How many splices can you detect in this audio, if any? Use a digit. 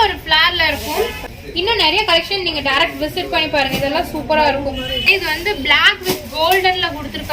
2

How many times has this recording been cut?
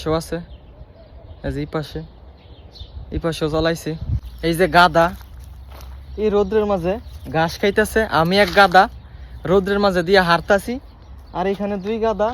1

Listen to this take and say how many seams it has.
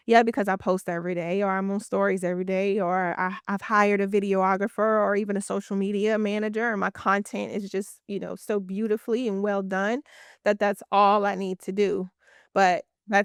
0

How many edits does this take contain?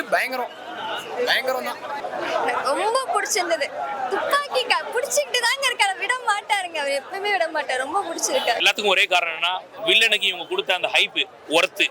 2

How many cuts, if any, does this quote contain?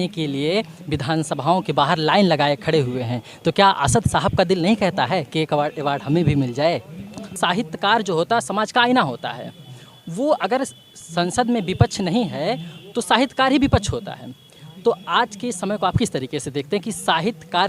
1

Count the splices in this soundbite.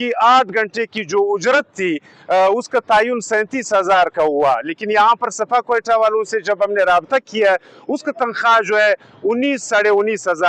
0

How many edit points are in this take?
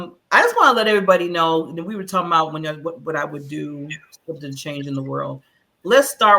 0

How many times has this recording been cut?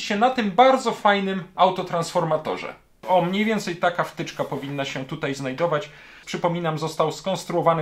2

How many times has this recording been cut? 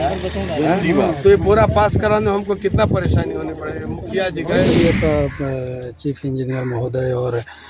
1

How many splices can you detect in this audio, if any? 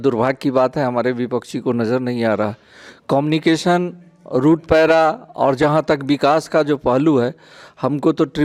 0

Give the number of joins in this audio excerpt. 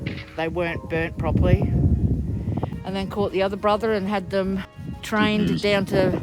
1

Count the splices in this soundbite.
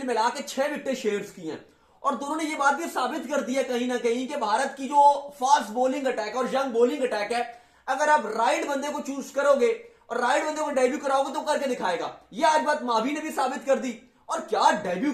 0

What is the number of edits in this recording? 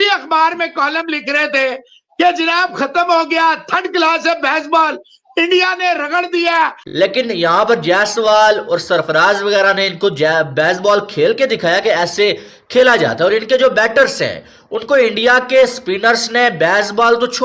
1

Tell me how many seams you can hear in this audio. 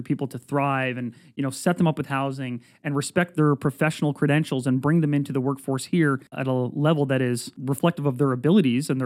2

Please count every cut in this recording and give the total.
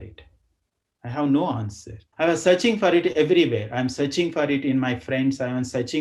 1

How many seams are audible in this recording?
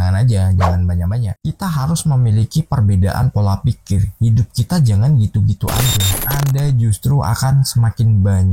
2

